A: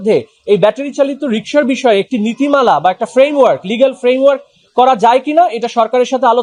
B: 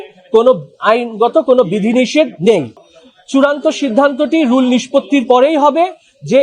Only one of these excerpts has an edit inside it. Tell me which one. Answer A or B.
B